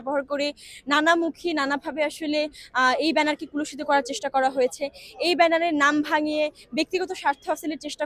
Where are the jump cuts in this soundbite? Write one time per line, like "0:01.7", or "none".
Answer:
none